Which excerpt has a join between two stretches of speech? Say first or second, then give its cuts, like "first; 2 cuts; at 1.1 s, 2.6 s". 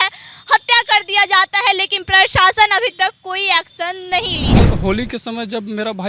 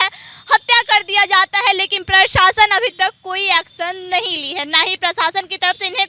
first; 1 cut; at 4.6 s